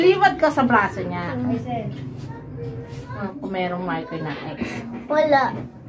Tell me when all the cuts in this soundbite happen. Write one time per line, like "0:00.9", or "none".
0:03.2

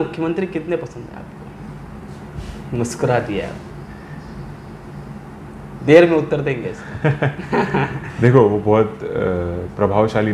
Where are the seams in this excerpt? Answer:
none

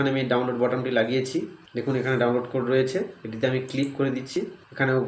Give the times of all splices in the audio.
0:01.6
0:04.3

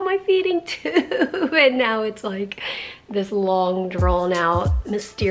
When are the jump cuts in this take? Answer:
none

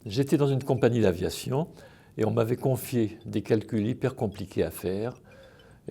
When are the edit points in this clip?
0:03.1

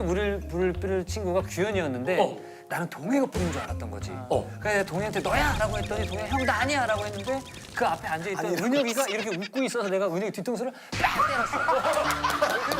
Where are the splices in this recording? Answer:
none

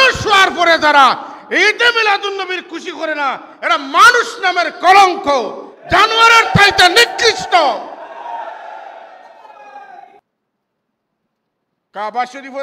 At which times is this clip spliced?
0:10.2

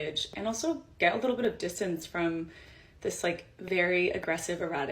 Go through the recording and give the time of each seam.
none

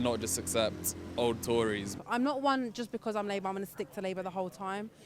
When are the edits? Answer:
0:01.9

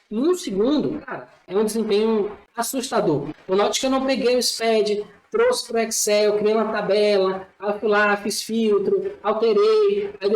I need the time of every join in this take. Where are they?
0:01.4
0:02.4
0:03.3

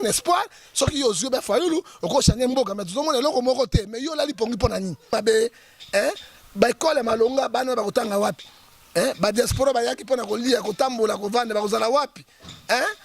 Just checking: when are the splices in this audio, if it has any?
0:05.1

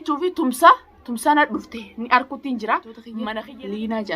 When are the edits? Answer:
0:03.2

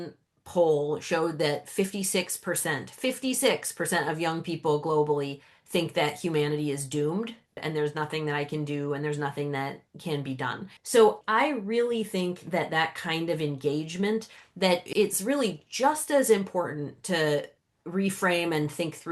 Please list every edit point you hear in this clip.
0:07.6

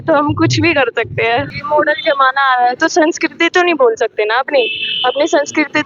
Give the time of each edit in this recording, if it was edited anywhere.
0:01.6

